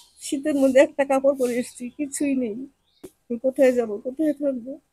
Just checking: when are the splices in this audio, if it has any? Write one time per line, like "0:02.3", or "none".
0:03.2